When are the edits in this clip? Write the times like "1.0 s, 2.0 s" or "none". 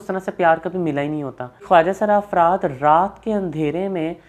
1.6 s